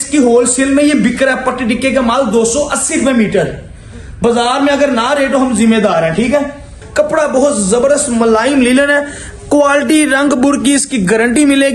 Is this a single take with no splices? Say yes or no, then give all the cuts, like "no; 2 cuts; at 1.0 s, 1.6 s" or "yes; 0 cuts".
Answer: no; 1 cut; at 6.8 s